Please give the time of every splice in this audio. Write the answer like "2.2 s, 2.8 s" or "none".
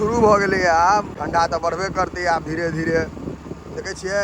1.1 s